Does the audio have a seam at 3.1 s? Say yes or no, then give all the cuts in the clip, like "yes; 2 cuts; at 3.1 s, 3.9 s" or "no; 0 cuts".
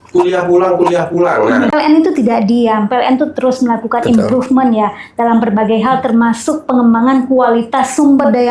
no; 1 cut; at 1.7 s